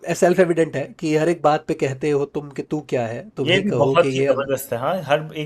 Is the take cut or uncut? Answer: uncut